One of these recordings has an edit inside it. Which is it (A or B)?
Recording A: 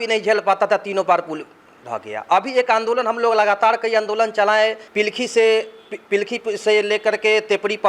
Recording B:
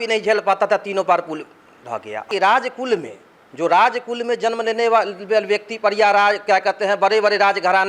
B